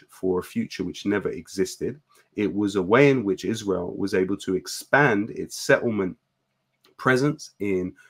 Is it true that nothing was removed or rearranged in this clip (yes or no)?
yes